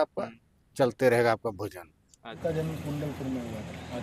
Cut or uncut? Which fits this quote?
cut